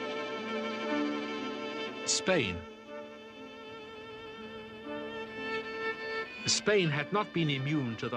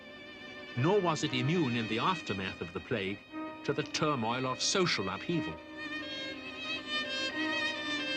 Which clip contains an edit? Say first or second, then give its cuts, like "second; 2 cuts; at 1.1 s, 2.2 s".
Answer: second; 1 cut; at 5.7 s